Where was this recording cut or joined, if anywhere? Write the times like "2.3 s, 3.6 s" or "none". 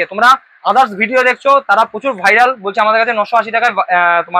none